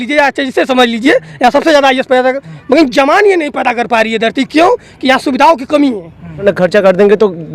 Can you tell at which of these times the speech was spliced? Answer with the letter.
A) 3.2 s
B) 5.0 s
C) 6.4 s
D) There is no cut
C